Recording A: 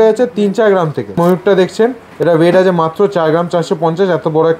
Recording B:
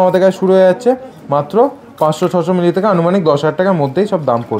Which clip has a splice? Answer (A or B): A